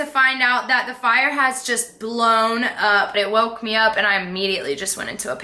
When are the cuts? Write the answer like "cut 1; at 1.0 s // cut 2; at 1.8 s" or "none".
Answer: cut 1; at 3.2 s